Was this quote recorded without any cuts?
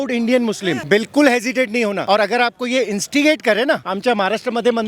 no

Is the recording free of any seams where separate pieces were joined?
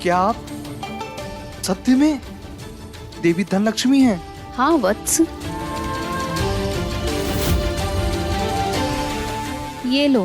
no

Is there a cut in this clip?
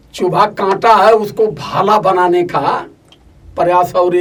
no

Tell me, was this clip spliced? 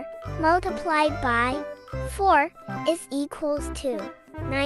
no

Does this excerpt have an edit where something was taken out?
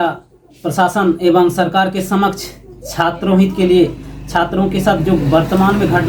no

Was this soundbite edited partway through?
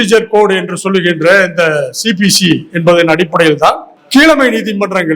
yes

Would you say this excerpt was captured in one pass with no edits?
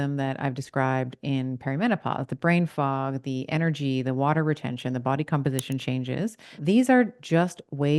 no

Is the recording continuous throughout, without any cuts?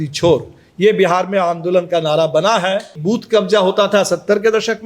no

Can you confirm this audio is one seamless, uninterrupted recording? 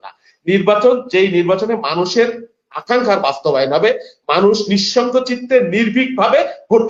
yes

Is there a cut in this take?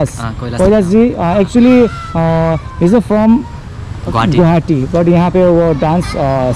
no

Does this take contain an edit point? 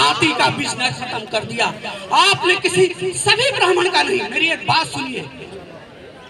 no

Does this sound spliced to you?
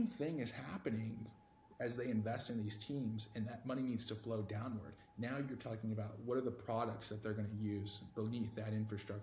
no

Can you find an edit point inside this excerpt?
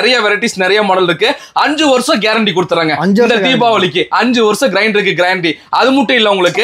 no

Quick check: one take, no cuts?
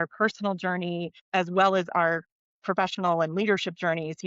no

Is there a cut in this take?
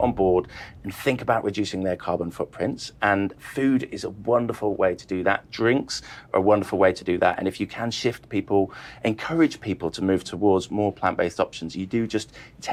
no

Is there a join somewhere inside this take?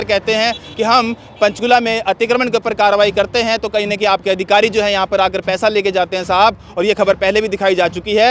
no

